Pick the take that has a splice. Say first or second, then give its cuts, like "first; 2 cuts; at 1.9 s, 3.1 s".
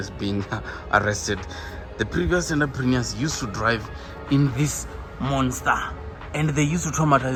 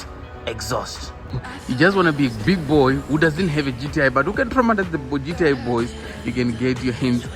second; 1 cut; at 1.3 s